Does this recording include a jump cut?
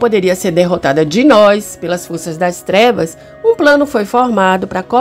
no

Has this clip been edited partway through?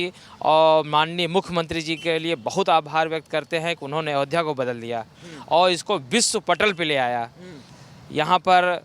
no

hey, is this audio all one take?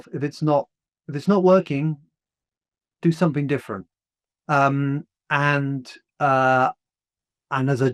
yes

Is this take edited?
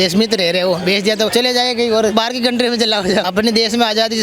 yes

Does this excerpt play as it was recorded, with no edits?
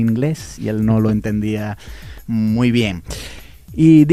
yes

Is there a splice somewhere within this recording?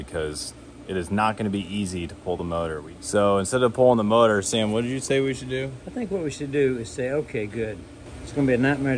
yes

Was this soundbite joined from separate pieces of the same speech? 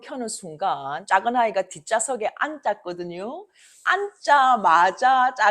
yes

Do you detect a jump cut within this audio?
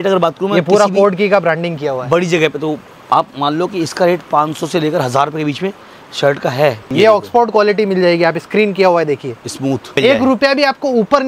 yes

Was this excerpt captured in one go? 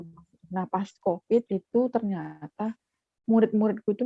yes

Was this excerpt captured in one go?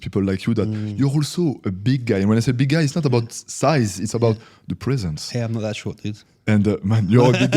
yes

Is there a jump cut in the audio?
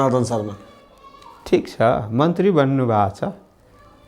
no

